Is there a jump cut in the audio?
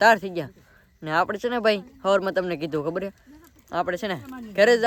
no; 0 cuts

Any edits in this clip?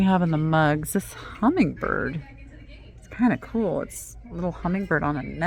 no; 0 cuts

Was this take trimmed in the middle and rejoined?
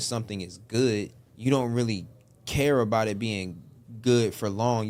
yes; 1 cut; at 1.2 s

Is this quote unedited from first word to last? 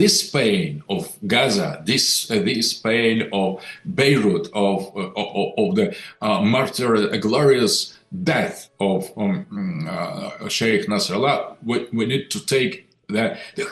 yes; 0 cuts

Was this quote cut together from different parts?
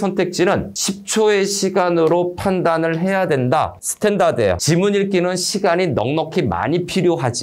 yes; 1 cut; at 4.6 s

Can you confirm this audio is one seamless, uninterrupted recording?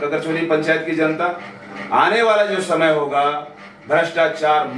yes; 0 cuts

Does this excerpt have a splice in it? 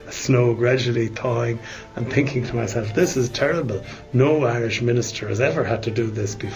no; 0 cuts

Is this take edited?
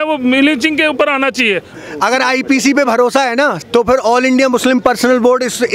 yes; 2 cuts; at 1.7 s, 3.6 s

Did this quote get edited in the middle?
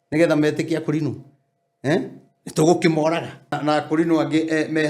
yes; 1 cut; at 3.5 s

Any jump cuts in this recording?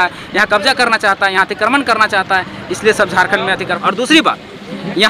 yes; 1 cut; at 3.7 s

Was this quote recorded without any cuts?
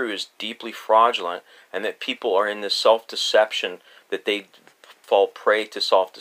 no; 1 cut; at 5.0 s

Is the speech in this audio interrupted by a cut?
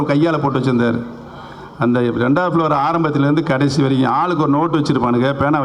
no; 0 cuts

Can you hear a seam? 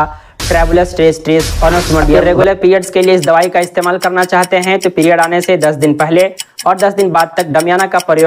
yes; 1 cut; at 2.2 s

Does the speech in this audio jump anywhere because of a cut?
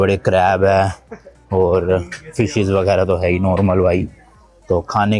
no; 0 cuts

